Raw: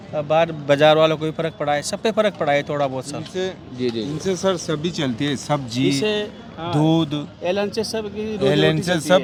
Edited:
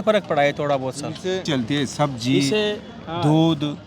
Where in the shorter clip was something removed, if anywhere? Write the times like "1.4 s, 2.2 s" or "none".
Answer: 1.4 s